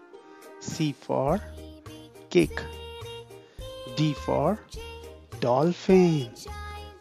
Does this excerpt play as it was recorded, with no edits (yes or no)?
yes